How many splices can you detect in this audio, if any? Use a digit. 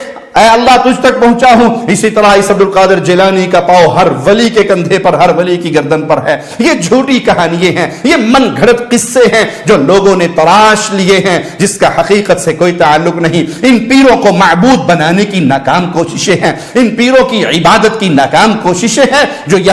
0